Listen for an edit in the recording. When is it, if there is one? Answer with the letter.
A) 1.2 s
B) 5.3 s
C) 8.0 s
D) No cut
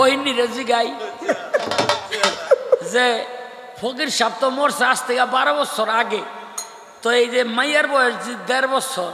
D